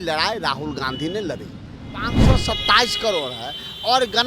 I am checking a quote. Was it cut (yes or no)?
yes